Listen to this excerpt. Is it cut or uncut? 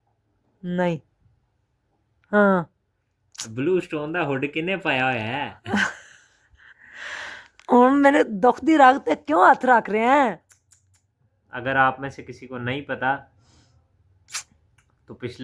uncut